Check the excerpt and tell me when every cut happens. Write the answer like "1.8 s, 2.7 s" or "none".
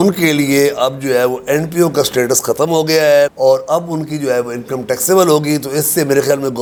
none